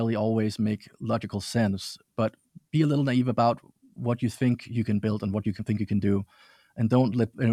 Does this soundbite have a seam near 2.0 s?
no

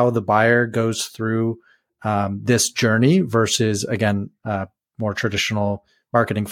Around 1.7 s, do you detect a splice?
no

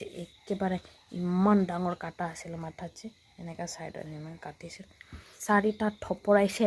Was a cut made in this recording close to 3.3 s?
no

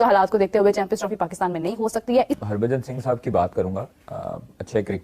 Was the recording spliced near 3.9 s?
no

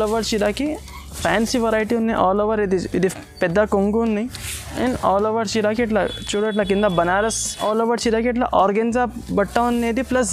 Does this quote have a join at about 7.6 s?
yes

